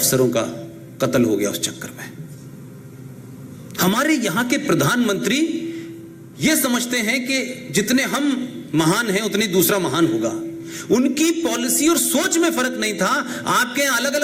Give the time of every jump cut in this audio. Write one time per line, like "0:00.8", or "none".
none